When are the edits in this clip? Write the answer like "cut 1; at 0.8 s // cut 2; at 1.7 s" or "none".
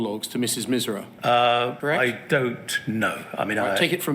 cut 1; at 1.1 s // cut 2; at 1.8 s

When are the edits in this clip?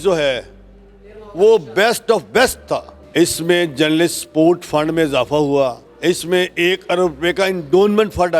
cut 1; at 3.0 s // cut 2; at 5.9 s

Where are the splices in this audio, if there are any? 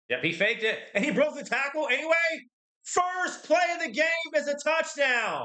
none

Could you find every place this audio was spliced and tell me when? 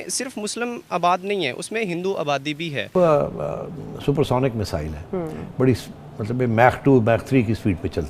cut 1; at 2.9 s

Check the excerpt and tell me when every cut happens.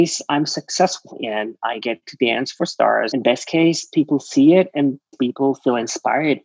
cut 1; at 1.2 s // cut 2; at 3.1 s // cut 3; at 5.1 s

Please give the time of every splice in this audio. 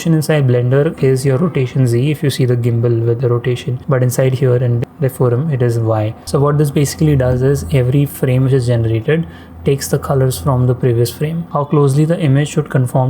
cut 1; at 3.7 s // cut 2; at 4.9 s // cut 3; at 6.2 s // cut 4; at 11.4 s

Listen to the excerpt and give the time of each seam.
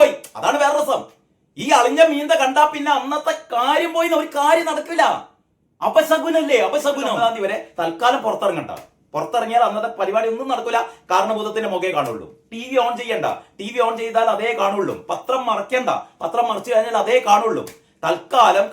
cut 1; at 7.2 s

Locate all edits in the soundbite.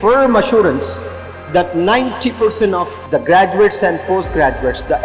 cut 1; at 3.0 s

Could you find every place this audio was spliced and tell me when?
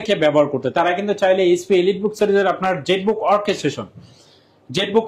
none

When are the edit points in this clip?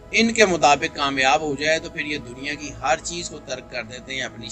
none

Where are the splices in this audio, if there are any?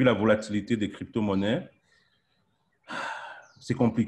none

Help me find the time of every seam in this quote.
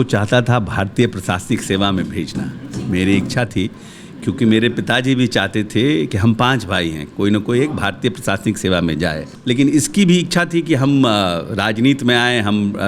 cut 1; at 9.3 s

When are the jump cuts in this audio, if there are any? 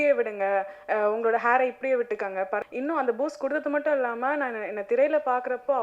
cut 1; at 2.6 s

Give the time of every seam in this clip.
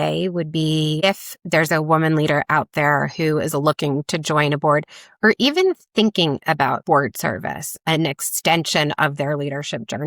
cut 1; at 6.8 s // cut 2; at 7.8 s

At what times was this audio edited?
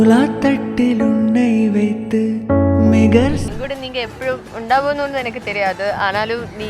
cut 1; at 3.4 s

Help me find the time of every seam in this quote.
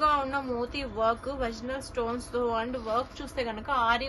none

